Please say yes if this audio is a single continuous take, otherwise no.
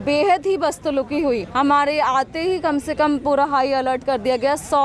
no